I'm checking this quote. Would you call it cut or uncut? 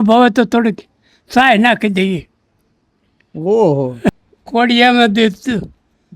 cut